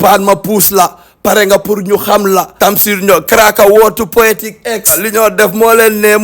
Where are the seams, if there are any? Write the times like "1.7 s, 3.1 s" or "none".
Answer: 2.7 s, 5.0 s